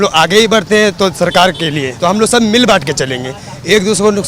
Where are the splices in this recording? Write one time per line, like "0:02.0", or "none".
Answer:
0:01.9